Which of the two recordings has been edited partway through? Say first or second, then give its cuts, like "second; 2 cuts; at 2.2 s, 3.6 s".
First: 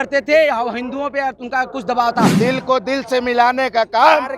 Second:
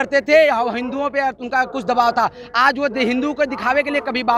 first; 1 cut; at 2.3 s